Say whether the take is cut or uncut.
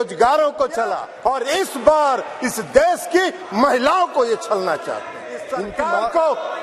cut